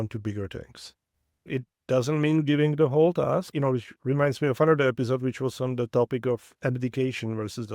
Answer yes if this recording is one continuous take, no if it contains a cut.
no